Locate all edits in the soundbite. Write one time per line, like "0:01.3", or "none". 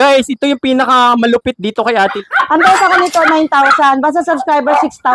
0:02.2